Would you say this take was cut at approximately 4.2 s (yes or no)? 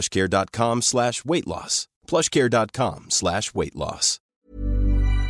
yes